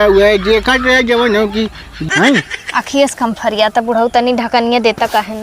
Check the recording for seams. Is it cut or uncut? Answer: cut